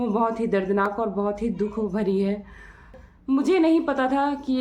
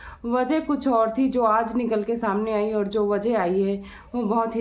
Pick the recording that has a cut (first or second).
first